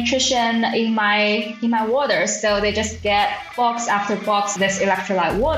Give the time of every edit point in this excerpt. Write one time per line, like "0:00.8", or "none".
0:03.4
0:04.5